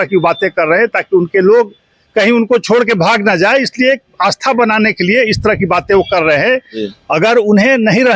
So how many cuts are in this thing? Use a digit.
1